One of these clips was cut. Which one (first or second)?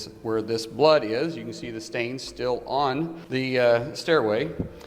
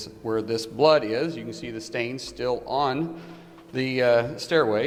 first